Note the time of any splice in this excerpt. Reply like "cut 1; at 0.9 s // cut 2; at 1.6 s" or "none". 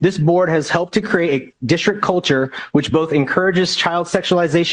none

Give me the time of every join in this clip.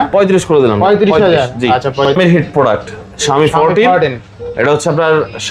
cut 1; at 2.2 s

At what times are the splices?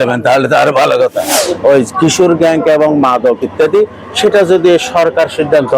cut 1; at 1.4 s

